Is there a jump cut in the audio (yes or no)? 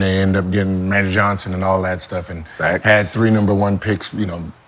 no